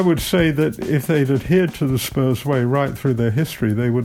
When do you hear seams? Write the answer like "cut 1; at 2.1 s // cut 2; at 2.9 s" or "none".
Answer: none